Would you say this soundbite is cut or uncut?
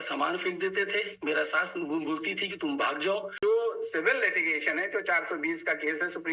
cut